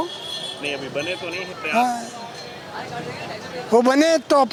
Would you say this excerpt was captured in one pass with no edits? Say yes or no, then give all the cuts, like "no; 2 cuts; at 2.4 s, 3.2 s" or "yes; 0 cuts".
yes; 0 cuts